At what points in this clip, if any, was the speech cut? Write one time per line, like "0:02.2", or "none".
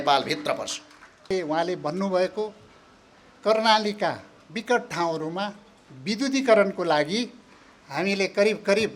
0:01.3